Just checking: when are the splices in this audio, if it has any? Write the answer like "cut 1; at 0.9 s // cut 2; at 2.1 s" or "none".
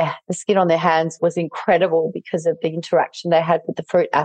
cut 1; at 1.2 s